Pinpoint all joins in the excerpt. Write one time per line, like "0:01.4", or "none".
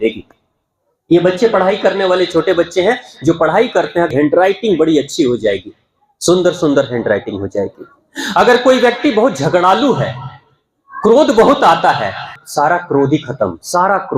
0:04.1
0:12.4